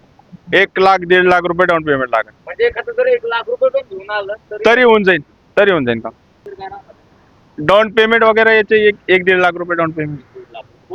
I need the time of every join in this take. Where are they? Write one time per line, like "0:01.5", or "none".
0:06.5